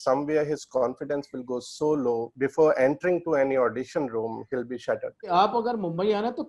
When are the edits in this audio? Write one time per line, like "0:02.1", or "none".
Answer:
0:02.3
0:05.3